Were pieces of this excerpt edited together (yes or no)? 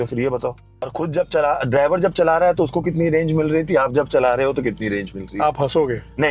yes